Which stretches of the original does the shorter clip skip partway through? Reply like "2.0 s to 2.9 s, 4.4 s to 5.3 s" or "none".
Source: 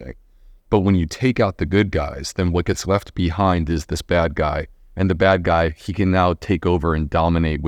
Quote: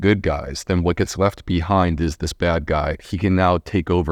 4.8 s to 5.8 s